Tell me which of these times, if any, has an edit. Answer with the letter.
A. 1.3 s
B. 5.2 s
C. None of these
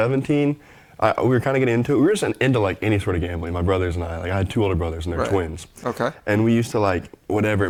C